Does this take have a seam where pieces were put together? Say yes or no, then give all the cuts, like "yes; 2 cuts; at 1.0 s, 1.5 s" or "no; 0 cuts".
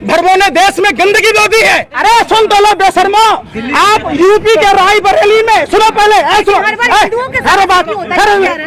yes; 1 cut; at 1.9 s